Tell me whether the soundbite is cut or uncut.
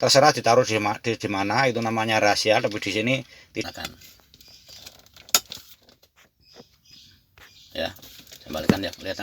cut